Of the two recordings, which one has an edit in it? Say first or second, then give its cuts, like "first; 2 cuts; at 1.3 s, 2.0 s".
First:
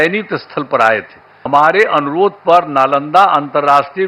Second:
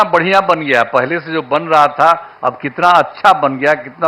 first; 1 cut; at 1.5 s